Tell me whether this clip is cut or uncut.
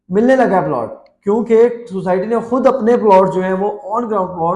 uncut